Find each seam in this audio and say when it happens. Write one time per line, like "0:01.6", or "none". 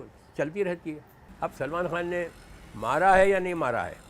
0:01.2